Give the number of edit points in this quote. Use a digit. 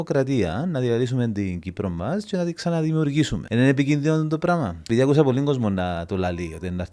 2